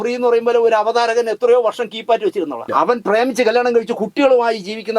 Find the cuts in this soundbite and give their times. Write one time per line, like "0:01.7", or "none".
0:02.7